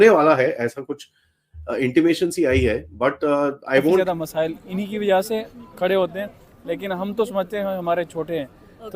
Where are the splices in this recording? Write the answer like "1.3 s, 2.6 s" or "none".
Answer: 4.0 s